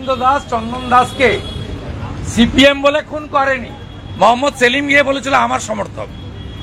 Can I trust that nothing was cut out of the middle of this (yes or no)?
yes